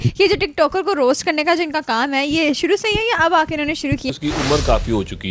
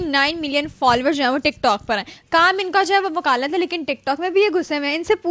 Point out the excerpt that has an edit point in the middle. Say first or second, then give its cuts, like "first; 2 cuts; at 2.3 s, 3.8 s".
first; 1 cut; at 4.1 s